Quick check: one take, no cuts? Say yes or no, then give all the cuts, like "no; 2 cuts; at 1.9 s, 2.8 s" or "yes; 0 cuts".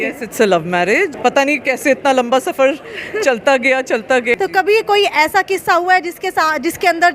no; 2 cuts; at 1.1 s, 4.4 s